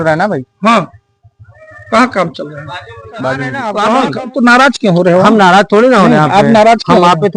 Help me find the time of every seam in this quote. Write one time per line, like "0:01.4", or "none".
0:03.6